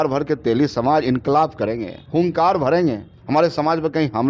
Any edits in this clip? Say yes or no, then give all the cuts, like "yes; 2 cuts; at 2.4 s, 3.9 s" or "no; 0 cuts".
yes; 2 cuts; at 1.9 s, 3.1 s